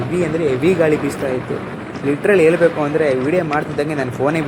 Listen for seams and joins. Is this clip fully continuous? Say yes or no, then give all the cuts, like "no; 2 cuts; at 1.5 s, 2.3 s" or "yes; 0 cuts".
yes; 0 cuts